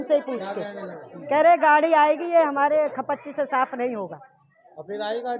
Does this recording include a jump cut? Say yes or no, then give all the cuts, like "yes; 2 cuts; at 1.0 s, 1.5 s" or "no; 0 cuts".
no; 0 cuts